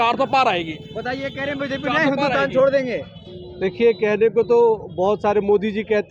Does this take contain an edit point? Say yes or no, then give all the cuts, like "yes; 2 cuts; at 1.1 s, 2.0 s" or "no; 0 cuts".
no; 0 cuts